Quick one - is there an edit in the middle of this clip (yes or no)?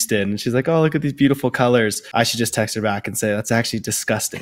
yes